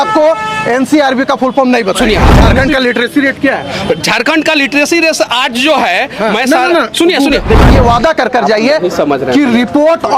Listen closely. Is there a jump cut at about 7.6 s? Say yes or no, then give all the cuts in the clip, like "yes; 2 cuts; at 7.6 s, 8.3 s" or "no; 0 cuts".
yes; 2 cuts; at 2.3 s, 7.6 s